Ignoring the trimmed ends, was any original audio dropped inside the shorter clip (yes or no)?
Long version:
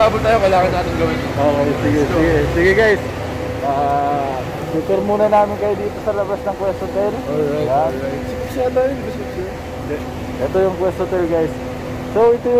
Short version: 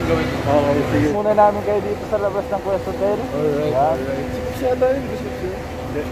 yes